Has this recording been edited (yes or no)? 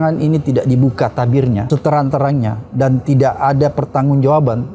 yes